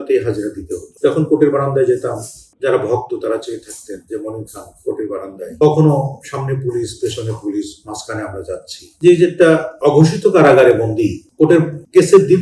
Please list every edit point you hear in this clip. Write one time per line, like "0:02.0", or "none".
none